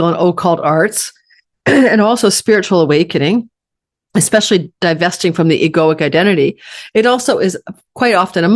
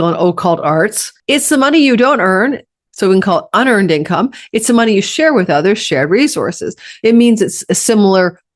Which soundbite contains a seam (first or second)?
second